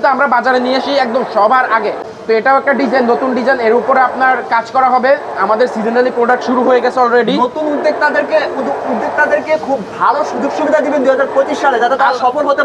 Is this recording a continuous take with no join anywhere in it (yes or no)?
yes